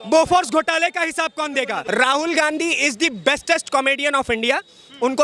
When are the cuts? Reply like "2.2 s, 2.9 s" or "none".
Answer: 1.8 s

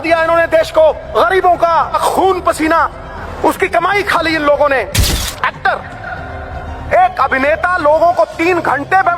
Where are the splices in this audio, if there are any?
1.0 s, 2.0 s, 3.2 s, 5.1 s

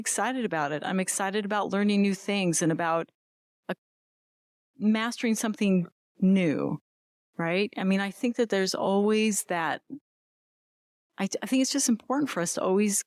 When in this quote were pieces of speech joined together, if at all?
none

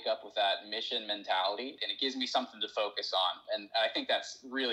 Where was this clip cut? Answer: 1.8 s, 3.4 s

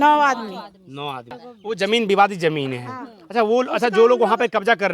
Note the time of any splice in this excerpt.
1.3 s

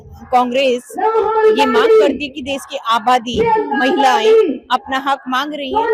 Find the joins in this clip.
none

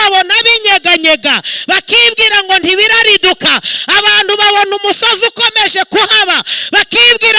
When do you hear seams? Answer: none

